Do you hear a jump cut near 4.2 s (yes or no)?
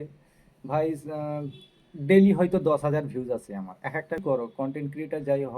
yes